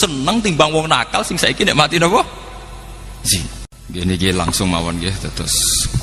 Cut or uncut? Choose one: cut